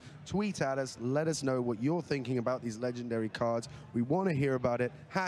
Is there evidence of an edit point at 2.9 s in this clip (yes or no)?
no